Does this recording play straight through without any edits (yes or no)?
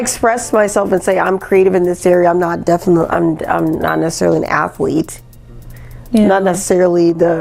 yes